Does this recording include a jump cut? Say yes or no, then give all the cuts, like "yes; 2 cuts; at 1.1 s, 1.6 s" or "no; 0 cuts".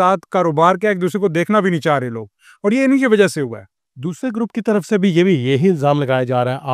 no; 0 cuts